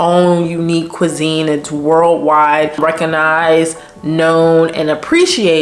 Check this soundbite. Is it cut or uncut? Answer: uncut